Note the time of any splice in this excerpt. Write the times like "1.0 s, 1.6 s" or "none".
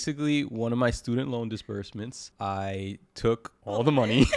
2.2 s, 3.5 s